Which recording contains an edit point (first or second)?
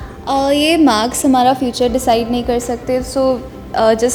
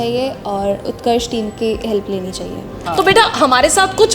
second